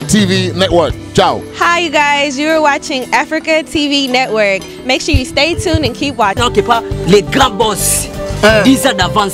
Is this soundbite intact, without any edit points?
no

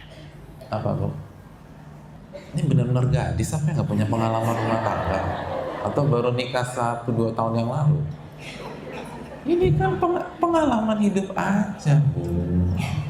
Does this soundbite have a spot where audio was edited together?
yes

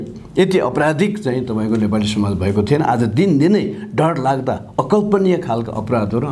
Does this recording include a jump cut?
no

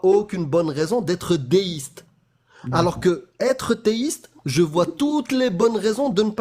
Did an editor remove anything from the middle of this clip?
no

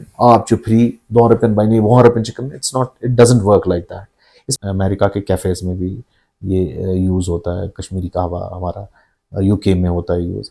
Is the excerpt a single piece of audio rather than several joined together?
no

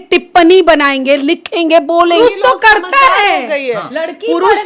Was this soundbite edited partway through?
yes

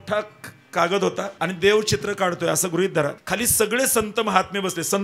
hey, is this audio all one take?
no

